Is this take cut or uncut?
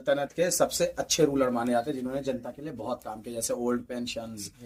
uncut